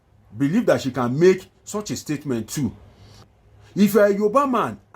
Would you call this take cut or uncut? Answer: cut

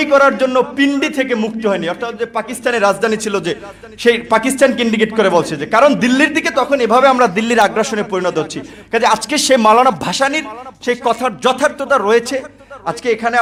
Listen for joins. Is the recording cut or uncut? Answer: uncut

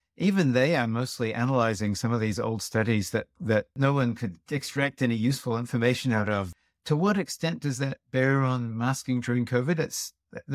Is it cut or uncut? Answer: cut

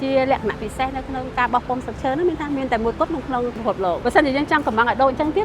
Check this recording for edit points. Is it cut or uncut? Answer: uncut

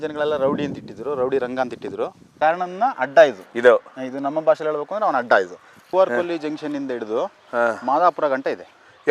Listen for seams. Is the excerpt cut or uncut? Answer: cut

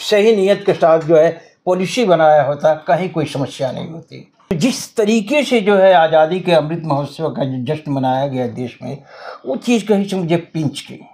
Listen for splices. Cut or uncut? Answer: cut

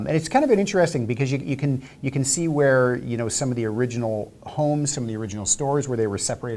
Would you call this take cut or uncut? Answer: uncut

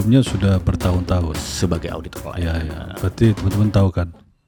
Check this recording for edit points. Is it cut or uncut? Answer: uncut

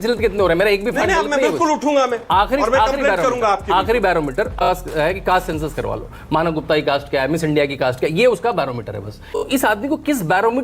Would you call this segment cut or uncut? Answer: cut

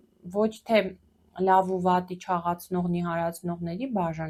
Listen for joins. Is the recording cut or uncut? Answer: uncut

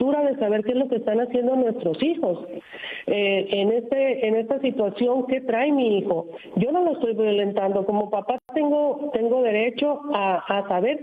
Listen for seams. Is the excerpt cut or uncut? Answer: uncut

